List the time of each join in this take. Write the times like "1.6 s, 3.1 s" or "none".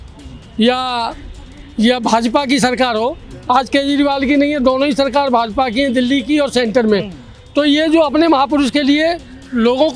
none